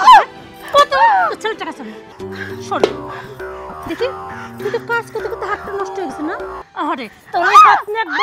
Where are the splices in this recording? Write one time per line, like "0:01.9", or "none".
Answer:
0:02.0